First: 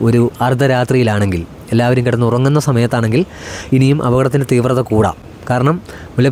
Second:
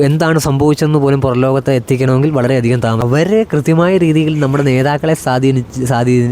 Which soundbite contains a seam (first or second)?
second